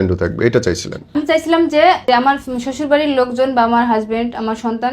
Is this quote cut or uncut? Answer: cut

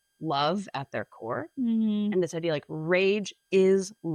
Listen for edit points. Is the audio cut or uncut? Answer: uncut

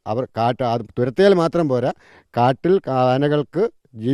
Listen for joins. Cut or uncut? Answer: uncut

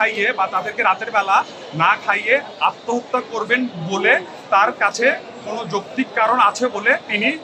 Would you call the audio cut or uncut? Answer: uncut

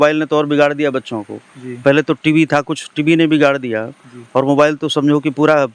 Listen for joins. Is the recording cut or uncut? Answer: uncut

